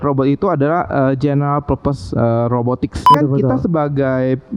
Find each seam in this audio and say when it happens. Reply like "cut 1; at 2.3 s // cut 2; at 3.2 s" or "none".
cut 1; at 3.1 s

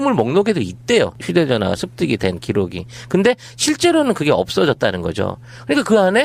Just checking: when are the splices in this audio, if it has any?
cut 1; at 2.6 s

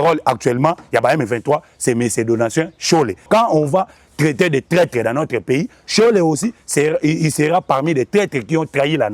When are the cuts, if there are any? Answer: cut 1; at 3.3 s

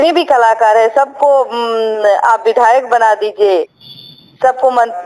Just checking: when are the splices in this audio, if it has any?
none

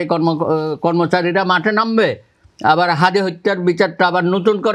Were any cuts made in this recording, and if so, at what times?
none

